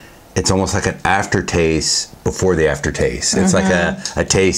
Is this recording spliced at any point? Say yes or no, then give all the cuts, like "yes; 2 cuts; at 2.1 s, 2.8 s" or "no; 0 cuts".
no; 0 cuts